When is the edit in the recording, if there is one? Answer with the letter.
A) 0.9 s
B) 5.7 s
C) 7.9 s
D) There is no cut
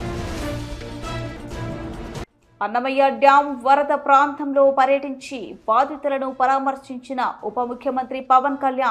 D